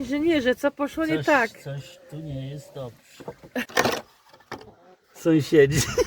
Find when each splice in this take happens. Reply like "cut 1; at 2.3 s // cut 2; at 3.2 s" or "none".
cut 1; at 3.7 s